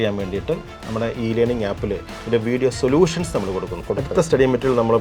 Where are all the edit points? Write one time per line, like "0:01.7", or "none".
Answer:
0:03.8